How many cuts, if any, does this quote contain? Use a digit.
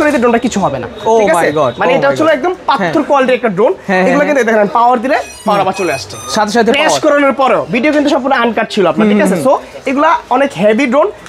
0